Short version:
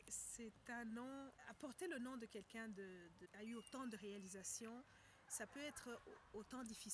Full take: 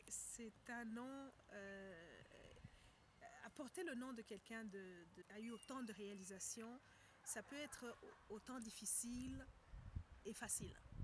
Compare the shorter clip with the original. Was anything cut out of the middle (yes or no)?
yes